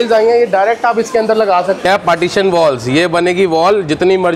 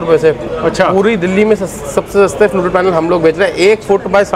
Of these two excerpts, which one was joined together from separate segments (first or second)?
first